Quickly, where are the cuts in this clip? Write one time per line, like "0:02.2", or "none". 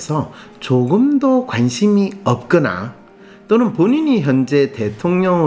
none

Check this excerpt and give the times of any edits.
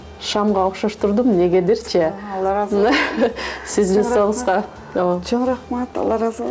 none

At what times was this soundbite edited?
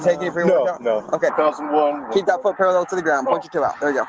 0:01.3

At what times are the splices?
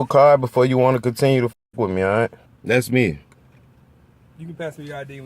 0:02.5

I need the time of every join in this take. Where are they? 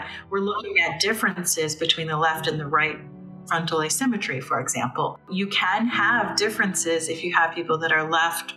0:05.3

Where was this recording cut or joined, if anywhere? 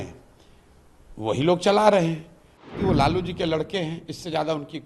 0:02.7

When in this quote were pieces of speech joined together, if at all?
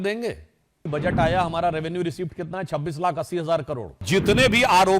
0:00.9
0:04.0

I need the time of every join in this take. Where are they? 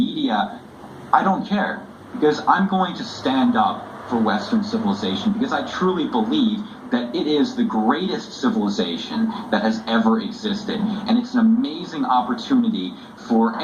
none

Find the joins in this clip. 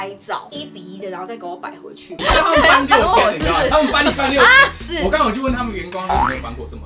0:02.2

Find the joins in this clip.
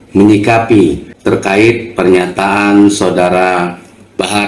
0:01.1

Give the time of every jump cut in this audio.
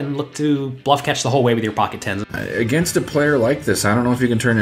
0:02.3

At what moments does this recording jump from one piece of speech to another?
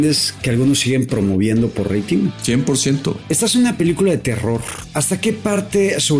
0:02.4
0:03.2
0:05.1

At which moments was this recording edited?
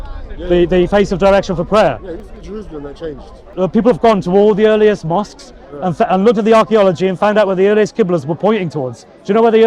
0:03.5

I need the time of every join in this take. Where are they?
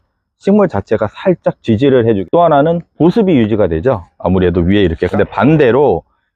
0:02.2
0:05.1

